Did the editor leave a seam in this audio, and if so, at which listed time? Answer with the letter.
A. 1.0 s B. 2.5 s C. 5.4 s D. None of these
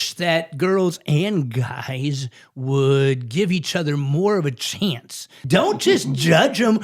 C